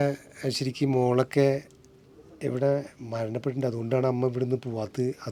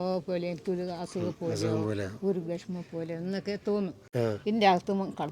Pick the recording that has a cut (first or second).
second